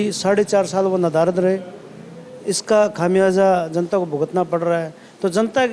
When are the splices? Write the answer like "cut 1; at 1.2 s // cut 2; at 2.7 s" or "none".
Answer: none